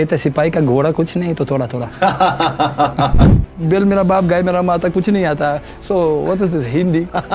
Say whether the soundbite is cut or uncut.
cut